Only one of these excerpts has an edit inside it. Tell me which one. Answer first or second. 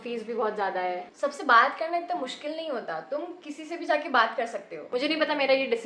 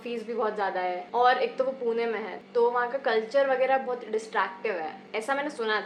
first